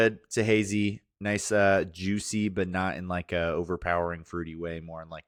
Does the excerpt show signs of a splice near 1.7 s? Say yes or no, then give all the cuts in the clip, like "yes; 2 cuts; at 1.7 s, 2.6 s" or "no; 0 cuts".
no; 0 cuts